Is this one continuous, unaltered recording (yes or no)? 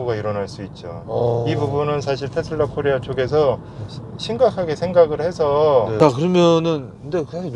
no